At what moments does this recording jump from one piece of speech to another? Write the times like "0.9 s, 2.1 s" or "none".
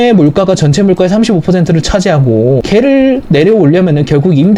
2.6 s